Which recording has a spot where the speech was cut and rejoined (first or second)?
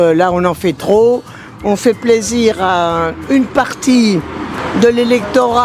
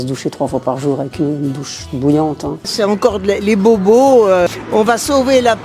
second